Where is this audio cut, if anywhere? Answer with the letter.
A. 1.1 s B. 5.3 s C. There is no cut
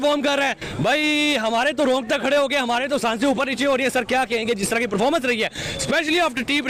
C